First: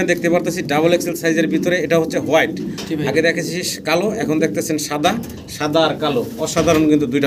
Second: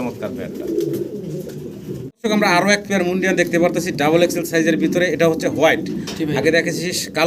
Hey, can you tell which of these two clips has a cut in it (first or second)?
second